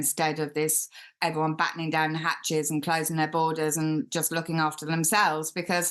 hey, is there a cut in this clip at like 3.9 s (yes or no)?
no